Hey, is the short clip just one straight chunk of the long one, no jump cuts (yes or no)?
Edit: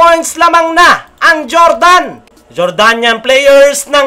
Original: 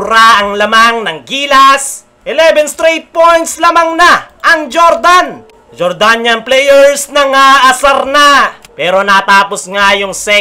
yes